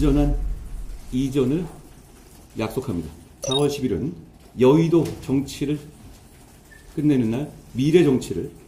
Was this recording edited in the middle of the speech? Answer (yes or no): yes